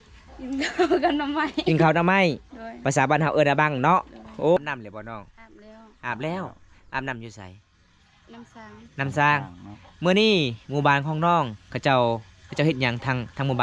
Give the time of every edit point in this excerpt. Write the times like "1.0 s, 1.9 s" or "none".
4.6 s